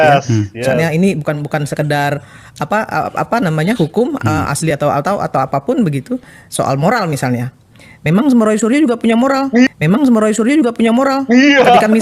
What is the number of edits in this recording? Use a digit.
0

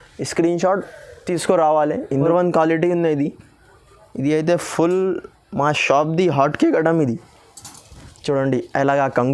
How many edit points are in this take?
1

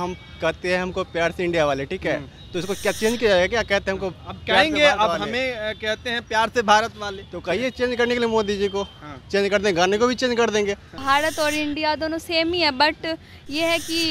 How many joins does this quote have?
1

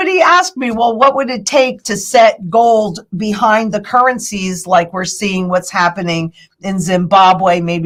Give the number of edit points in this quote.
0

